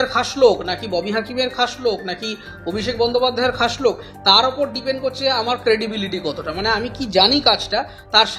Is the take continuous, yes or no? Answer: yes